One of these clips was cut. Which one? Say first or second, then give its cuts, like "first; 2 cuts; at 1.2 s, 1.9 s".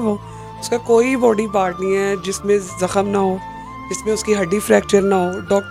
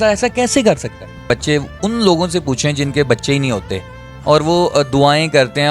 second; 1 cut; at 1.2 s